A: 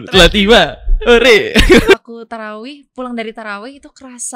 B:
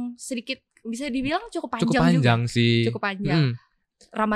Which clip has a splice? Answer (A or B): A